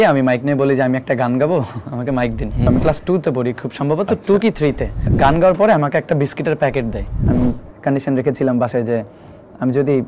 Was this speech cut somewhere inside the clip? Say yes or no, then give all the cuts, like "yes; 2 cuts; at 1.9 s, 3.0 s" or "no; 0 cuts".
yes; 3 cuts; at 2.6 s, 5.1 s, 7.2 s